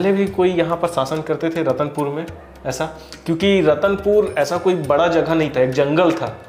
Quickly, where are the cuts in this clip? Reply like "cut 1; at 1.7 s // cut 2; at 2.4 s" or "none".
none

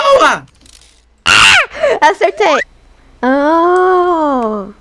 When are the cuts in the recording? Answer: cut 1; at 2.7 s

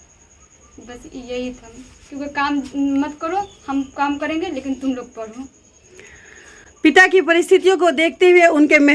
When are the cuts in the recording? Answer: none

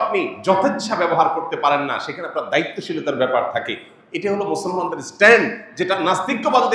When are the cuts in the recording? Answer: none

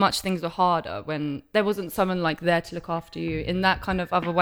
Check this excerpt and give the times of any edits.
none

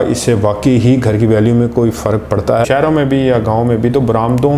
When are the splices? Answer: cut 1; at 2.6 s

